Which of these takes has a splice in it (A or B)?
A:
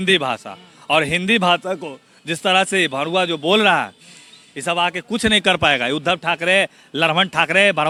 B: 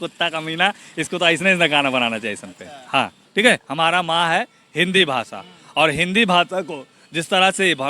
B